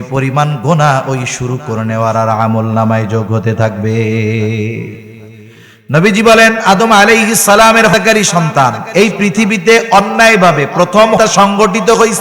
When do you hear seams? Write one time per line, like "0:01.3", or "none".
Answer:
0:07.9
0:11.2